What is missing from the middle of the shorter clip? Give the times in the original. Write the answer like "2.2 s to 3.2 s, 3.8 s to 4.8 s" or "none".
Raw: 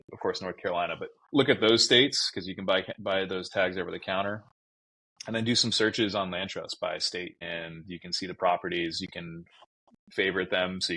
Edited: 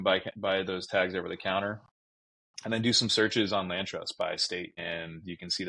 none